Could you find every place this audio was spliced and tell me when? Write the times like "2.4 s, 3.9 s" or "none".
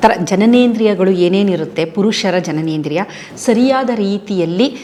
none